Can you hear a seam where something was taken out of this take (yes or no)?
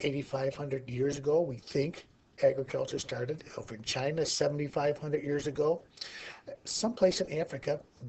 yes